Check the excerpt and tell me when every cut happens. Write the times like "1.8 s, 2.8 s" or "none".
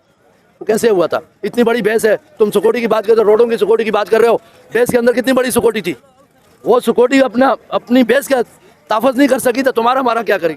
none